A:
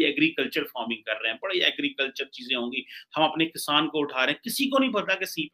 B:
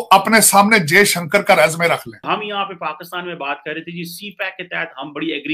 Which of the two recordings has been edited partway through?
B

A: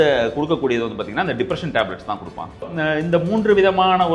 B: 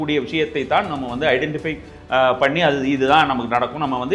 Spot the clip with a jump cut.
A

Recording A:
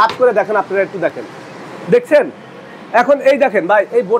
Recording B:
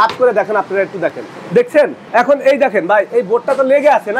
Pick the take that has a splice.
B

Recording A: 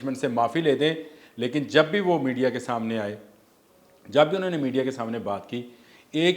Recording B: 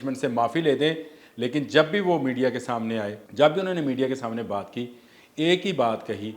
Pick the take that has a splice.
B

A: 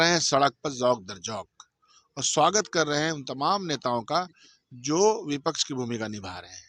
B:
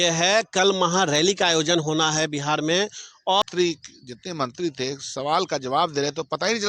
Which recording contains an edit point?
B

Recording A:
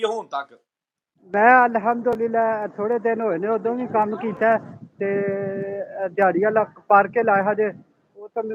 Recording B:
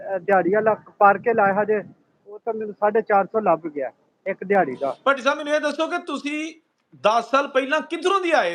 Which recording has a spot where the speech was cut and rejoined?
B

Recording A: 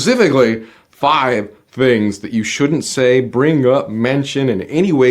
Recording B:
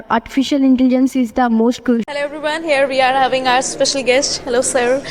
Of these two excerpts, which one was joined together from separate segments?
B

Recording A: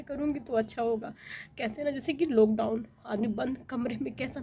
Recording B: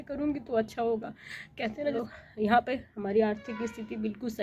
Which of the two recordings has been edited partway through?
B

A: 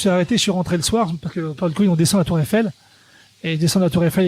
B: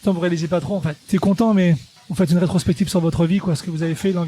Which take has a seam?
B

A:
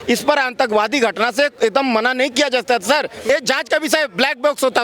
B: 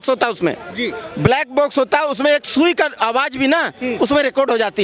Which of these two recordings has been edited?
A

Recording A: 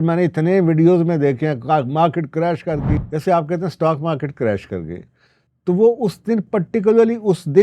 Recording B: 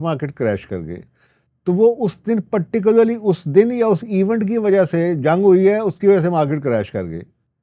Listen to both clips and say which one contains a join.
A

